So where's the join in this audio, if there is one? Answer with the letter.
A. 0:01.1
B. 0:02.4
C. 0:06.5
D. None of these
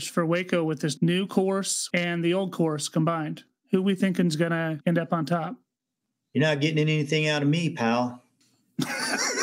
D